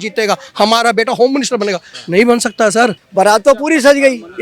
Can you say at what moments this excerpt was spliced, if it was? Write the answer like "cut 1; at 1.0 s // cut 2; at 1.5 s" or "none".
cut 1; at 3.0 s